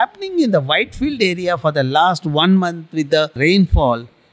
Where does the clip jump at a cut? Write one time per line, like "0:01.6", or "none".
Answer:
0:03.4